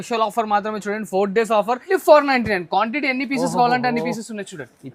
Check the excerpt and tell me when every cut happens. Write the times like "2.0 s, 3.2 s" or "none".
1.9 s